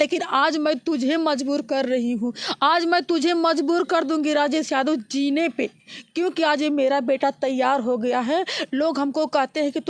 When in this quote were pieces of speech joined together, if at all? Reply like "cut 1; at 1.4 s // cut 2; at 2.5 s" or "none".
none